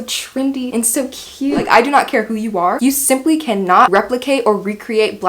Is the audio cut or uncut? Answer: cut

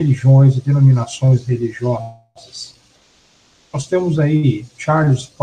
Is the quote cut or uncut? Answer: uncut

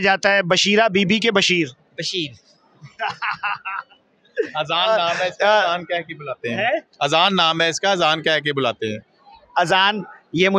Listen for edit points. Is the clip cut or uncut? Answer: uncut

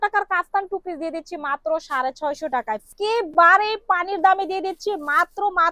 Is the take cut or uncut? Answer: cut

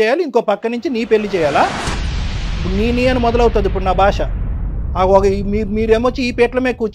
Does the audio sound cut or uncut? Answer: uncut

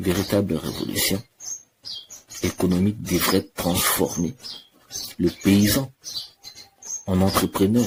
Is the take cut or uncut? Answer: uncut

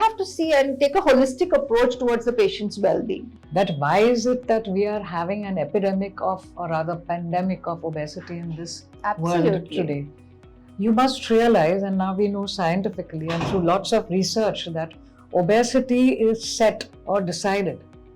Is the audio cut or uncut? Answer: cut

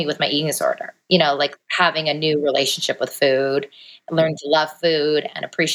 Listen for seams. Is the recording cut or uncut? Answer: cut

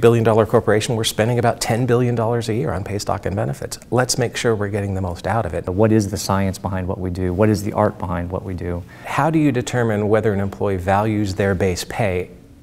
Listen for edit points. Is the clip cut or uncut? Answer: cut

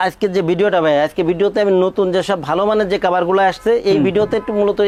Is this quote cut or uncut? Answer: uncut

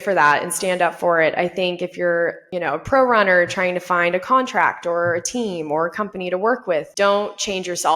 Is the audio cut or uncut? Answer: cut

